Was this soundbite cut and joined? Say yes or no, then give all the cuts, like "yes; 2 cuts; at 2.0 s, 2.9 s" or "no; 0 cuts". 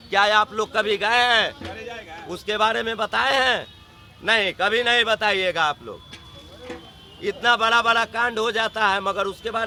no; 0 cuts